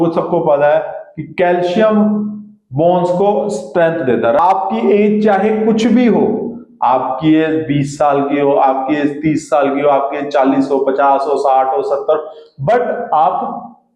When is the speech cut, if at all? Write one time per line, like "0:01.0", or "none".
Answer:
0:04.4